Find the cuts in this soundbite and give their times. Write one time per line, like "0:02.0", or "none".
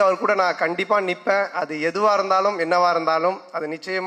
none